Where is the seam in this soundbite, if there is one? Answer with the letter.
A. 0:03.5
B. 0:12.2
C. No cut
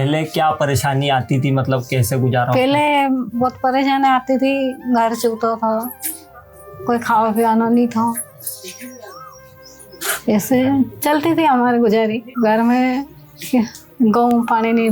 B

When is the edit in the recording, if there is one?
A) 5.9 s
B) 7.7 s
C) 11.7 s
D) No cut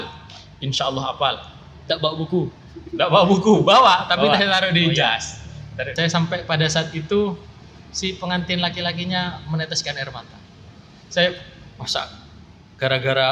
A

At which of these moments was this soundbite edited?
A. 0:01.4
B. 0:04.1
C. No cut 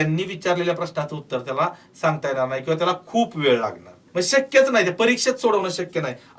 B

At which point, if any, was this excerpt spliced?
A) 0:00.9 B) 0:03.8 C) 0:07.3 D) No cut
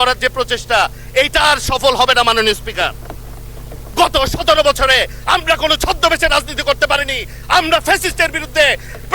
B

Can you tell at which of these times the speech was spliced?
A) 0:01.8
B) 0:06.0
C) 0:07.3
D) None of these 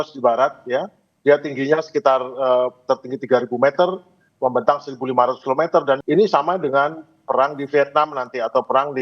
B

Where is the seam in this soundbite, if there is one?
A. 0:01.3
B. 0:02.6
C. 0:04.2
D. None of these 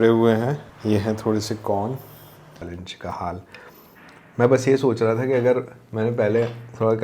B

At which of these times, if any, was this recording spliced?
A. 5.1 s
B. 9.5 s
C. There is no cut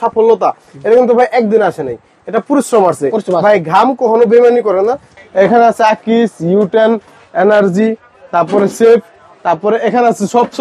A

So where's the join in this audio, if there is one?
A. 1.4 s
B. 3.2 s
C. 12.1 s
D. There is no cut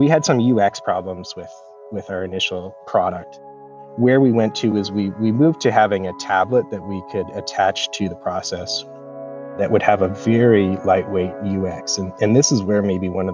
B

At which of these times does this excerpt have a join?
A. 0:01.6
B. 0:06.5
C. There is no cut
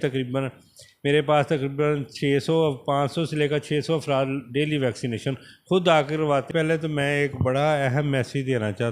B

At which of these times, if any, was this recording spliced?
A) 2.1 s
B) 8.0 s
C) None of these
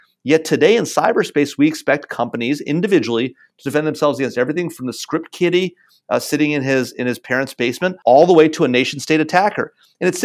B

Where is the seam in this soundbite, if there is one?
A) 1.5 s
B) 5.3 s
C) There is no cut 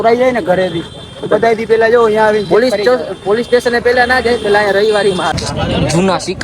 B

